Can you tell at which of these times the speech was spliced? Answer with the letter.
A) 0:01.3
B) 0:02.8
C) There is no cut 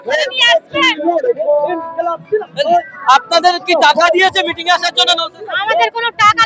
C